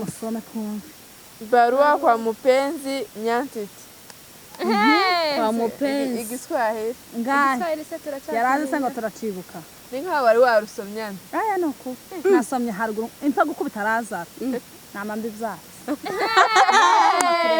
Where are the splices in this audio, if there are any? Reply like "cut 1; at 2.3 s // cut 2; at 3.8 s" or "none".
none